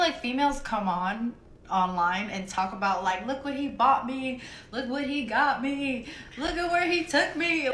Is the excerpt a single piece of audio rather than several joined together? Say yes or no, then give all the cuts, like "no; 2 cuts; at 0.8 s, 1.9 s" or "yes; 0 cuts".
yes; 0 cuts